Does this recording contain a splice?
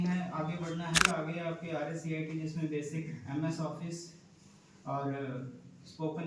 yes; 1 cut; at 1.0 s

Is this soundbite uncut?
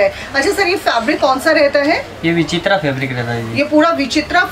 yes; 0 cuts

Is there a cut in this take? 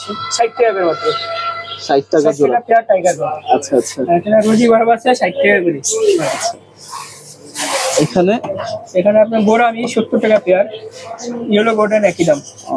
no; 0 cuts

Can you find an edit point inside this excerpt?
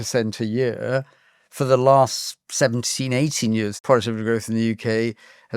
yes; 1 cut; at 3.8 s

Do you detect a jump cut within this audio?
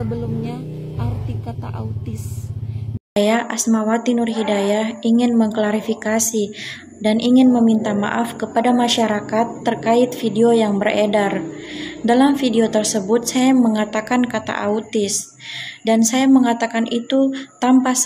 yes; 1 cut; at 3.0 s

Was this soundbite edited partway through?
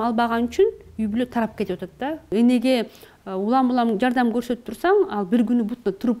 yes; 1 cut; at 2.2 s

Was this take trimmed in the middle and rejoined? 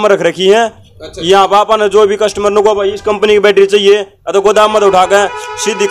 no; 0 cuts

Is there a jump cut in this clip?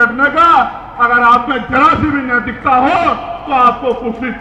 no; 0 cuts

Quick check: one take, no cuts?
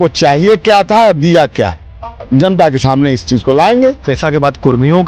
no; 1 cut; at 4.1 s

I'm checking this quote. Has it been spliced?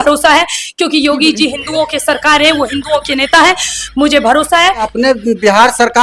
yes; 1 cut; at 4.9 s

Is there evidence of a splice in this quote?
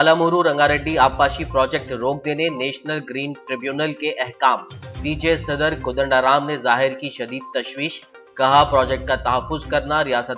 no; 0 cuts

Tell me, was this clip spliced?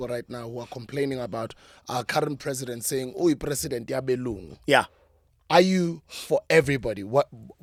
no; 0 cuts

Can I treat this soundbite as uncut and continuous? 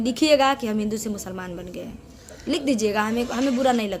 yes; 0 cuts

